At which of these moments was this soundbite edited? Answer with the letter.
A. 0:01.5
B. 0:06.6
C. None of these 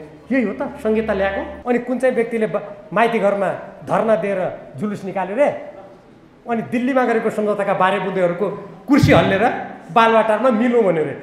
A